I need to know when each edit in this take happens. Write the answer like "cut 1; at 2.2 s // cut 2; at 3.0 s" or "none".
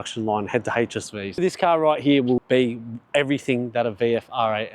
cut 1; at 1.4 s // cut 2; at 2.4 s